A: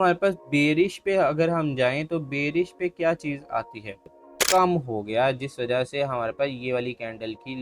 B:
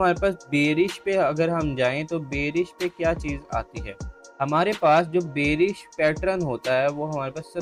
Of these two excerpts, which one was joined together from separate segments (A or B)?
A